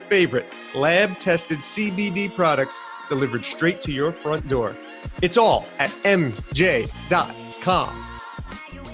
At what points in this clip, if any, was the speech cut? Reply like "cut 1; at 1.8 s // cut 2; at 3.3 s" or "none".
cut 1; at 7.9 s